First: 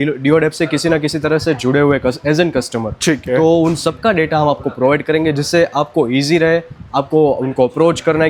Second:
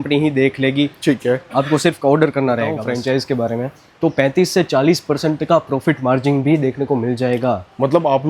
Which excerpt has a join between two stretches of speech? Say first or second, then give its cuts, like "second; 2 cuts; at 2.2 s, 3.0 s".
second; 1 cut; at 2.8 s